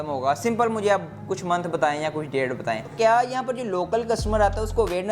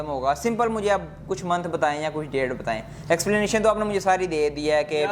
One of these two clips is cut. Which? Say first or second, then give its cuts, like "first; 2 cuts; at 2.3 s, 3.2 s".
first; 1 cut; at 2.9 s